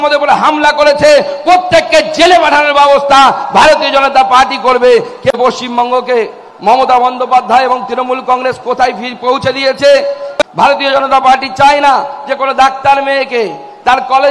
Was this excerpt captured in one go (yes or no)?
no